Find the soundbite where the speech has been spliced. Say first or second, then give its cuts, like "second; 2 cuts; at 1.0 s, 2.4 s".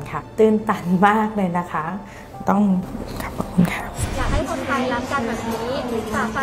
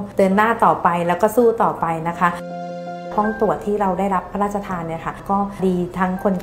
first; 1 cut; at 4.0 s